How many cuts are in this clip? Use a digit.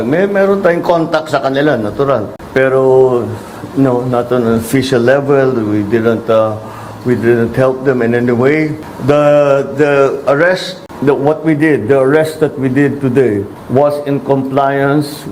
0